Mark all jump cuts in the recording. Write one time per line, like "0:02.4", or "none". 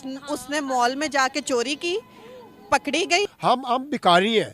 0:03.3